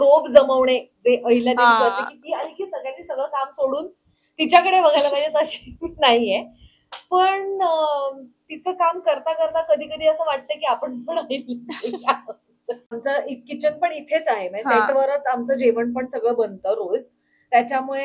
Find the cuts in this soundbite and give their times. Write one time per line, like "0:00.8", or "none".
0:13.0